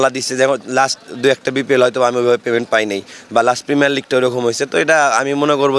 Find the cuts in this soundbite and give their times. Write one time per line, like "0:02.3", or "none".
none